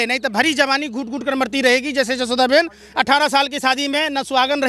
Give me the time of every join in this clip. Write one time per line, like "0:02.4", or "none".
none